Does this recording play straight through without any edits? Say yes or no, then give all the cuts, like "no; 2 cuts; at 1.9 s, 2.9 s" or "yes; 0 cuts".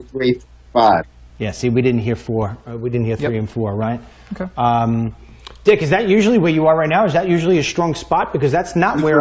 yes; 0 cuts